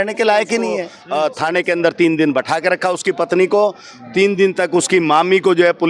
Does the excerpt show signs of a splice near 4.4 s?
no; 1 cut; at 1.0 s

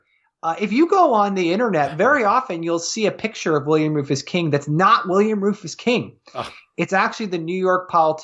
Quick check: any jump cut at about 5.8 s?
no; 0 cuts

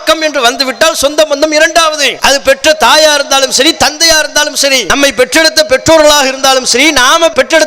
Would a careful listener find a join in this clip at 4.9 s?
yes; 2 cuts; at 2.1 s, 4.9 s

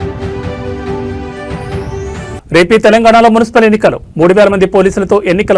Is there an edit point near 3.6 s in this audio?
no; 1 cut; at 1.2 s

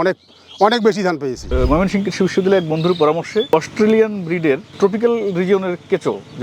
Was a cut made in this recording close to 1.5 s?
yes; 1 cut; at 1.5 s

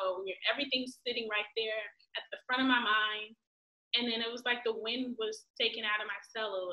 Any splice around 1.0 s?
no; 0 cuts

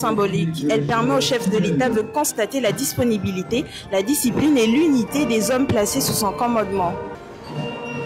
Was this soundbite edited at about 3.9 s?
no; 1 cut; at 7.2 s

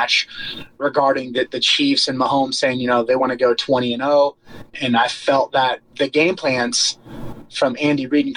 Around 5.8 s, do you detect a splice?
yes; 2 cuts; at 4.7 s, 5.8 s

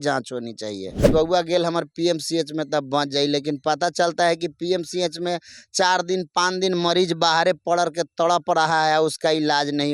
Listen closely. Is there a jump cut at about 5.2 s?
no; 1 cut; at 1.0 s

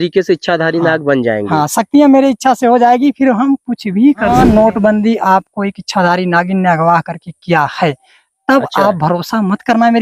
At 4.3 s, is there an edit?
yes; 1 cut; at 4.3 s

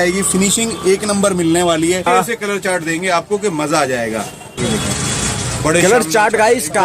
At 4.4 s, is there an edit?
yes; 2 cuts; at 2.1 s, 4.4 s

